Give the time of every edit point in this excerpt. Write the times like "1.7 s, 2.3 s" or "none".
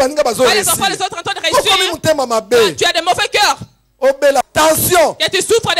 4.5 s